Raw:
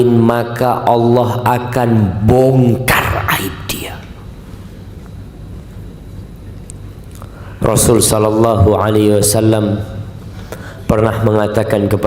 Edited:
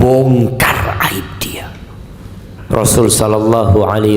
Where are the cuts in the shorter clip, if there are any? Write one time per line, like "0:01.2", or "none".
0:02.5